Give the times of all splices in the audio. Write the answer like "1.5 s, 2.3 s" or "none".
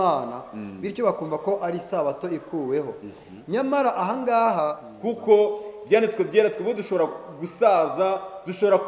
4.9 s